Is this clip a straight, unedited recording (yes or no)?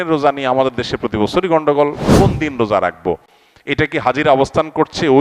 no